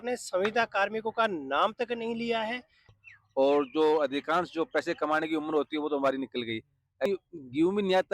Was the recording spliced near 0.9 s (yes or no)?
no